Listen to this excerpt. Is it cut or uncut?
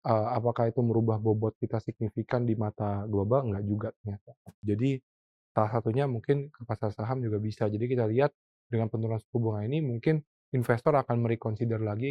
cut